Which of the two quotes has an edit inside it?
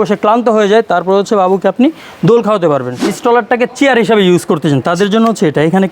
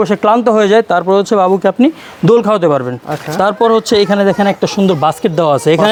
first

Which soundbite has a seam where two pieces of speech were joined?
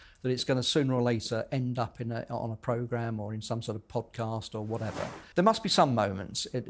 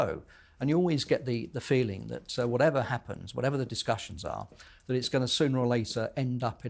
first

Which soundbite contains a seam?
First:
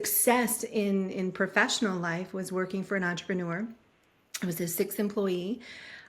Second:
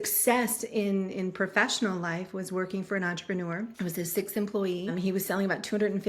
second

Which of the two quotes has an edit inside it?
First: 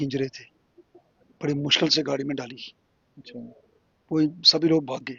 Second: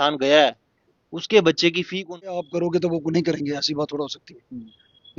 second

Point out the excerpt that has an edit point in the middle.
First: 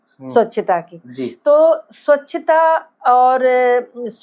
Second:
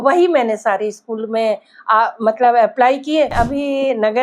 second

